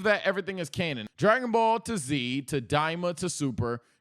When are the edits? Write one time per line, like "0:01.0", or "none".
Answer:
0:01.0